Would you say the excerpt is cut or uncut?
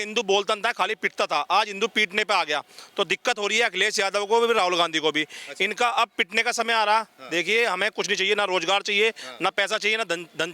uncut